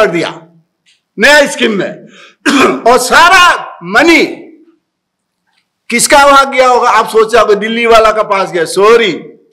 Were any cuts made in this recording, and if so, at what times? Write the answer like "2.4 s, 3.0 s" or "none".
none